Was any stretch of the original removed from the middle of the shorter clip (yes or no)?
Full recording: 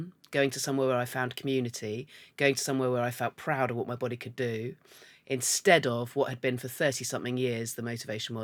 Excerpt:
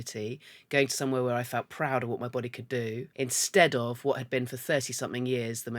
yes